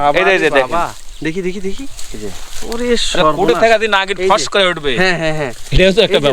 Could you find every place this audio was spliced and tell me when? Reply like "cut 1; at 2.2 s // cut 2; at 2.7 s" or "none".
none